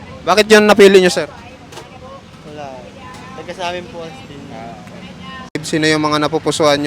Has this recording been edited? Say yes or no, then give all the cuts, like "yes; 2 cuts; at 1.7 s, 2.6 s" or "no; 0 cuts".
yes; 1 cut; at 5.6 s